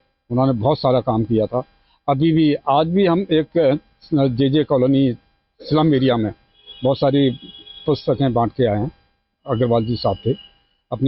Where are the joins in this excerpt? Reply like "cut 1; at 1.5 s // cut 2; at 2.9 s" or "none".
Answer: none